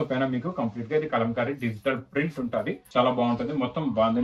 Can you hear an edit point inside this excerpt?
yes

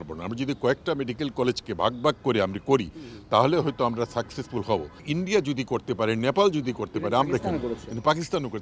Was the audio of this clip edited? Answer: no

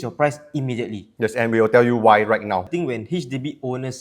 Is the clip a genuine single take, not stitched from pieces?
no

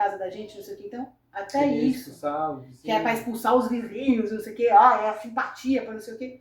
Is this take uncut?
yes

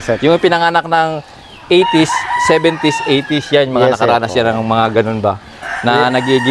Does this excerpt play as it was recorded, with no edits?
yes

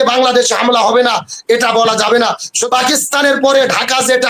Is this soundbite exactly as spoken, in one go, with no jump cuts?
no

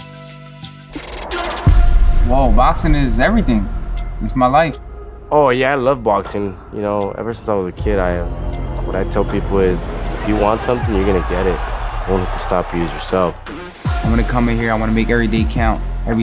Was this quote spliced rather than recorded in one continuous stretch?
yes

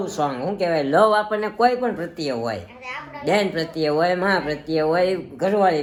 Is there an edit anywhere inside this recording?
no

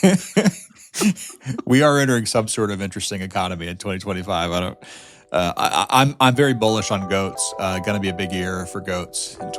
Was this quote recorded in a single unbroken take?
yes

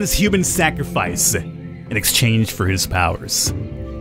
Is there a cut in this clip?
no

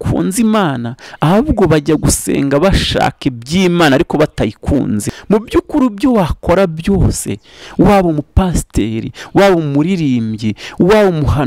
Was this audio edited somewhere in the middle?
yes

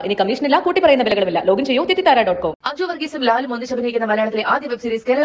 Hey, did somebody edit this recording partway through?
no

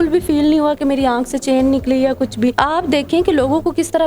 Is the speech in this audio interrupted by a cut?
yes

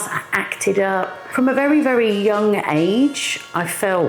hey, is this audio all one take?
no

